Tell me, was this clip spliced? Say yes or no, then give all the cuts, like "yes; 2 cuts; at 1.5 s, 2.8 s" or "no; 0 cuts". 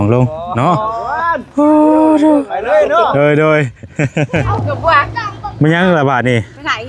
yes; 1 cut; at 4.5 s